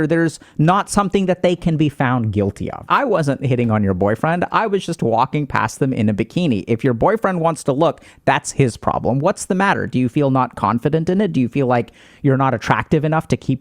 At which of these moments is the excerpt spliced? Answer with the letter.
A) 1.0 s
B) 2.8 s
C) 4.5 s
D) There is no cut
B